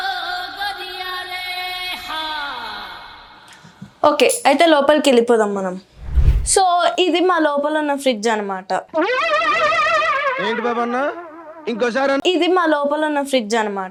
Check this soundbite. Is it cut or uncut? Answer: uncut